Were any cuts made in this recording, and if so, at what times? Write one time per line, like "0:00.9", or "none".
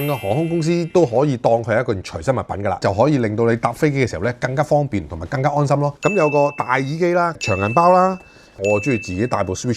0:02.8
0:06.0
0:08.6